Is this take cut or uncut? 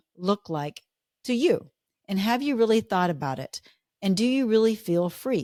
uncut